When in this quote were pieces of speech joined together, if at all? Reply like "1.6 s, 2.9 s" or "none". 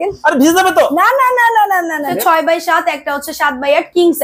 2.1 s